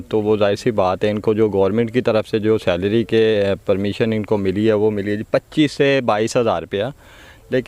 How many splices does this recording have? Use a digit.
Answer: 0